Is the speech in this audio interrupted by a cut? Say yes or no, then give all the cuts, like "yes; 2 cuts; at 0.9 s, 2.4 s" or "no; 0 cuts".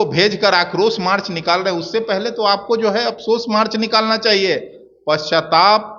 no; 0 cuts